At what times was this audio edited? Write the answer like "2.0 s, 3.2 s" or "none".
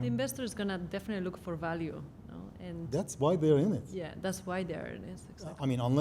none